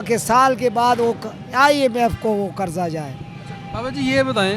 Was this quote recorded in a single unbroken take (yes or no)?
yes